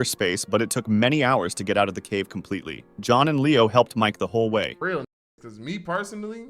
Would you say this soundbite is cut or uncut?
cut